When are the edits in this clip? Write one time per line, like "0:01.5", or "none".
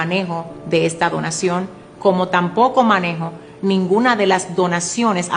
none